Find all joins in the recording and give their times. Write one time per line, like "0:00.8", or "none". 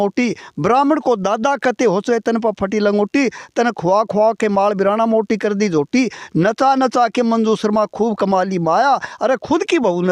none